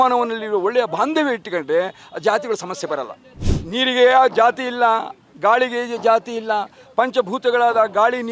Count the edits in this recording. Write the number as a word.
one